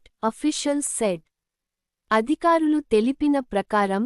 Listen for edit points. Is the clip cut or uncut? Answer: uncut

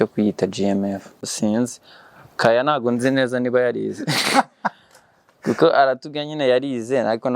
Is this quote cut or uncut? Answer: cut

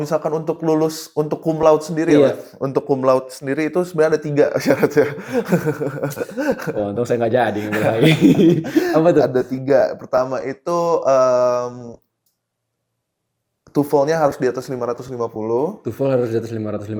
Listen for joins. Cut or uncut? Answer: uncut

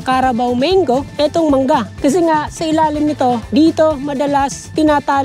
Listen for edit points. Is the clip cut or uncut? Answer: cut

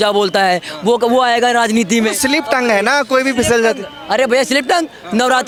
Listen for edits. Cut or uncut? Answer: uncut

